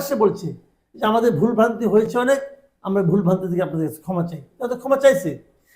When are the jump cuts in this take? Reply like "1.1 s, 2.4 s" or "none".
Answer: none